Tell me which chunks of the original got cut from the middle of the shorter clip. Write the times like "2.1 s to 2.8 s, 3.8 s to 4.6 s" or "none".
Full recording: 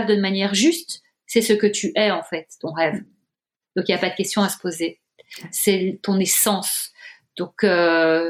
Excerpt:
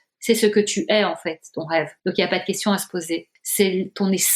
3.0 s to 3.6 s, 5.1 s to 5.4 s